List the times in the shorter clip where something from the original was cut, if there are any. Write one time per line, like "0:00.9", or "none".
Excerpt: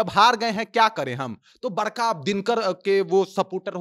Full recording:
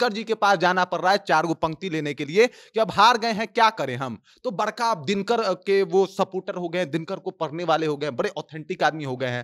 none